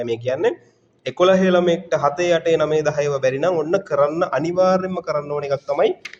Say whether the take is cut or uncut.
uncut